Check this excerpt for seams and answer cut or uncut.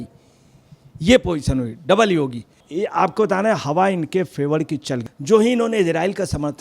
cut